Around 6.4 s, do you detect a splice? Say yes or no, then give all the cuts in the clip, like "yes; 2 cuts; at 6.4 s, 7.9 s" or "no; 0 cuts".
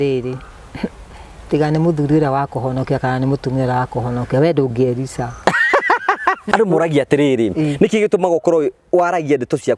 yes; 1 cut; at 6.4 s